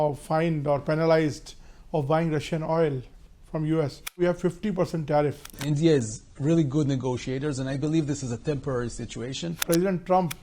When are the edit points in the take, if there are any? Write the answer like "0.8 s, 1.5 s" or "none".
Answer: 4.2 s, 5.6 s, 9.6 s